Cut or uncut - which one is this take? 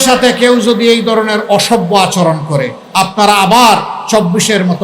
cut